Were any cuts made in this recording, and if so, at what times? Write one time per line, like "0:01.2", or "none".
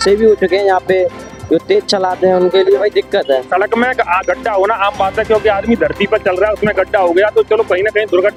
none